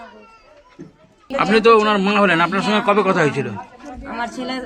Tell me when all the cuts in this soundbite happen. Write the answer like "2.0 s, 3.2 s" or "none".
1.3 s